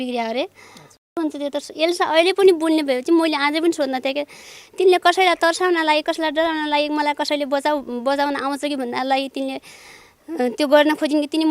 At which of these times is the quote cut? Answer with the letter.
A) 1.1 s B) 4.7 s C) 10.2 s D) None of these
A